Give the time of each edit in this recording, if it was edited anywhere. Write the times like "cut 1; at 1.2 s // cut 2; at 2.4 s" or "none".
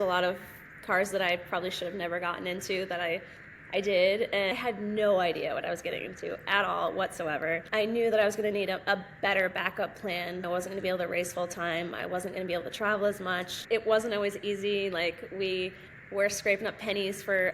cut 1; at 4.5 s // cut 2; at 7.6 s // cut 3; at 10.4 s // cut 4; at 13.6 s